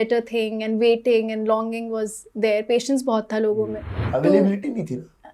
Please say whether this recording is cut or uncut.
cut